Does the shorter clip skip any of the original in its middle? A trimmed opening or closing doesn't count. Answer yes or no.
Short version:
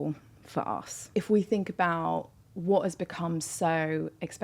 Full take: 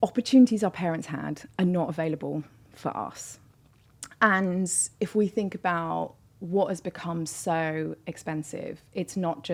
yes